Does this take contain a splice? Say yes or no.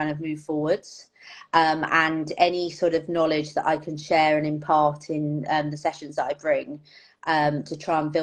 no